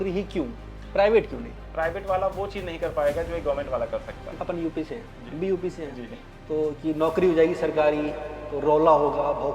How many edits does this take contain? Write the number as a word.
two